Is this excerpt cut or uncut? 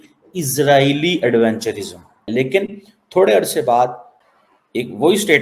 cut